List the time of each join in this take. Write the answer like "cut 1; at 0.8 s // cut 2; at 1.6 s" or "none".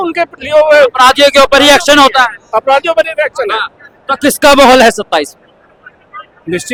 none